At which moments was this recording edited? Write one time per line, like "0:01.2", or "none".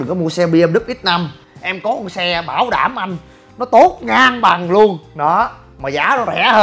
none